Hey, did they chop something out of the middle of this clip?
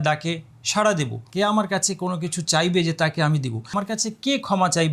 yes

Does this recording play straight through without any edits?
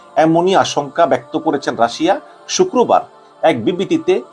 yes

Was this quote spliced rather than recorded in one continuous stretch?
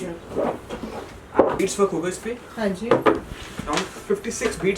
yes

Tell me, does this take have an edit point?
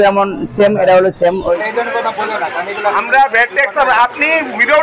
yes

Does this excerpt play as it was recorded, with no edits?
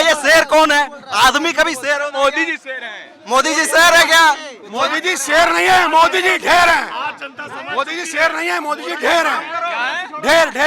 yes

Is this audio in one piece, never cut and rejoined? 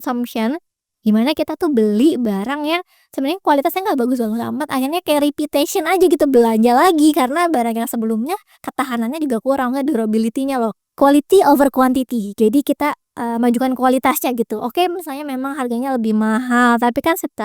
no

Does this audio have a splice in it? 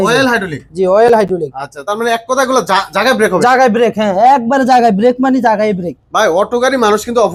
no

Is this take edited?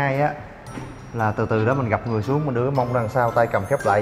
no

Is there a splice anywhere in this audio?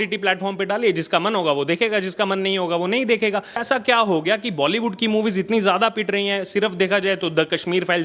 yes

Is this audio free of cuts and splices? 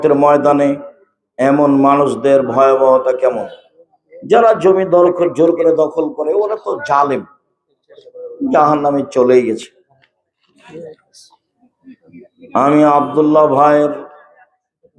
yes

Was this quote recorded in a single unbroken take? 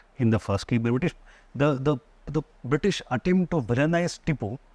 yes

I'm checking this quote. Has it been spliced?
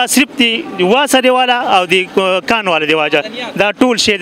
no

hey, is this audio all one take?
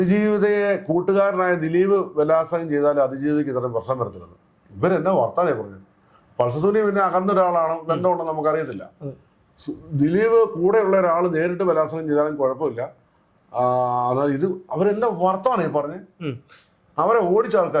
yes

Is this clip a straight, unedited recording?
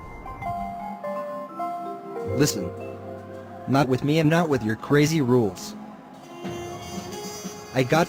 yes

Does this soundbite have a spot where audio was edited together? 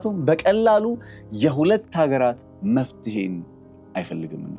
no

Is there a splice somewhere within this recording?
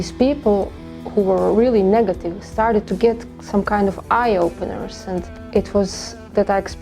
yes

